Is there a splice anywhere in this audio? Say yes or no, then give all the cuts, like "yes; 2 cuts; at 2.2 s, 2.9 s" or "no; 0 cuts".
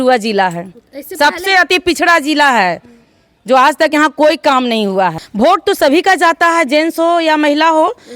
yes; 1 cut; at 5.2 s